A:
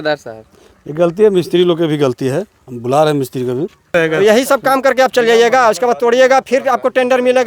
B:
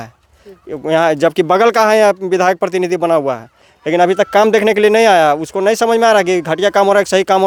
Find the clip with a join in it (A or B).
A